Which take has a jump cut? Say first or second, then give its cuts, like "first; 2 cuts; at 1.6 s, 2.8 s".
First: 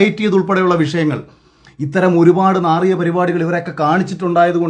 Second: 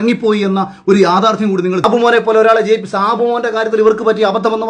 second; 1 cut; at 1.8 s